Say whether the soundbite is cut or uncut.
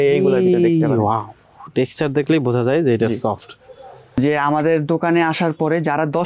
cut